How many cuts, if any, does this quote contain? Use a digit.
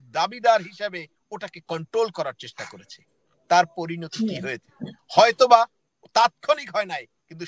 0